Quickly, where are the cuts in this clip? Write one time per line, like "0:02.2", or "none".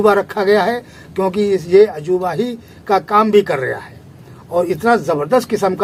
none